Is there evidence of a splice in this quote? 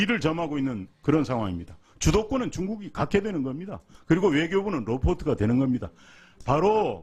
no; 0 cuts

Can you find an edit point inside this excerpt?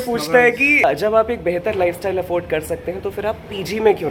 no; 0 cuts

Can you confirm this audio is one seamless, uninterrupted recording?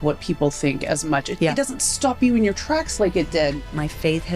no; 2 cuts; at 1.3 s, 3.6 s

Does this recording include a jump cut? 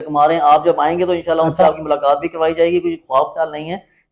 no; 0 cuts

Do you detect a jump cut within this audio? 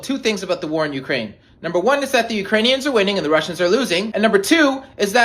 yes; 1 cut; at 4.1 s

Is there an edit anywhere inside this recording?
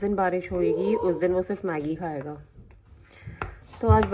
no; 0 cuts

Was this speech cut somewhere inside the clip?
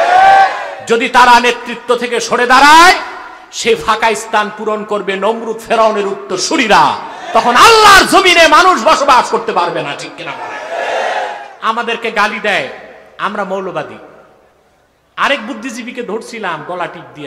yes; 1 cut; at 11.5 s

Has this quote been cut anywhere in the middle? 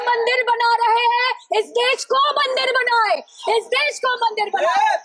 no; 0 cuts

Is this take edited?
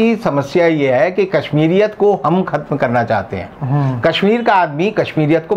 no; 0 cuts

